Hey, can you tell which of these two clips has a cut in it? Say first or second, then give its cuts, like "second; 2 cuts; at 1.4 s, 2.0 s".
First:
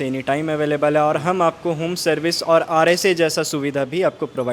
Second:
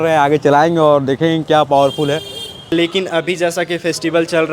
second; 1 cut; at 2.7 s